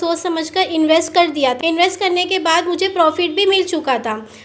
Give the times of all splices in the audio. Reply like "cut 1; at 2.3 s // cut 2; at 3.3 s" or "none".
cut 1; at 1.6 s

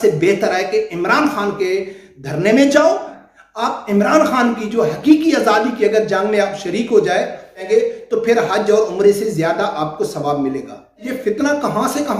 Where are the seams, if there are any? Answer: cut 1; at 3.2 s // cut 2; at 7.6 s // cut 3; at 11.1 s

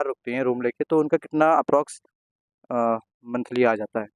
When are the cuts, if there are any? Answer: none

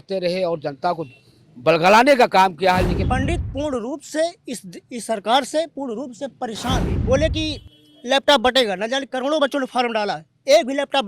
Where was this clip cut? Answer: cut 1; at 3.0 s // cut 2; at 6.9 s

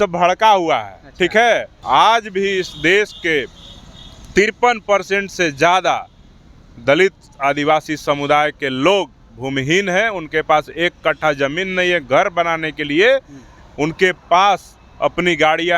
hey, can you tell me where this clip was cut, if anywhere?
cut 1; at 1.7 s

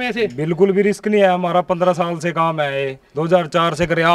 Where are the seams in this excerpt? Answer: none

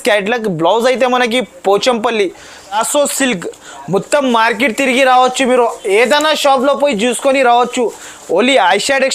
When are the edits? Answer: cut 1; at 2.8 s

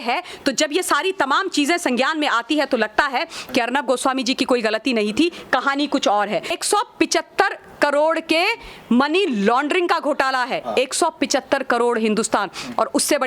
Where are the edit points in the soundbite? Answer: cut 1; at 6.6 s

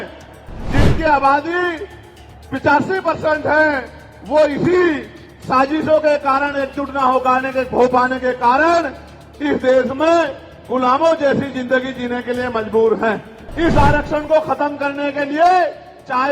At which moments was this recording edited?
cut 1; at 13.4 s

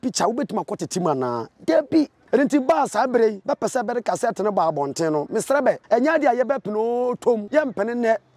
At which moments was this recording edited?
cut 1; at 2.2 s // cut 2; at 3.4 s // cut 3; at 5.8 s // cut 4; at 7.5 s

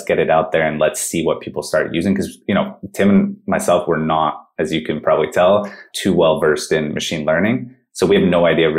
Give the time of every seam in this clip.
none

